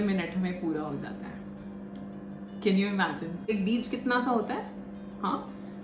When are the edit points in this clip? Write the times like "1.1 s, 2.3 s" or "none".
3.5 s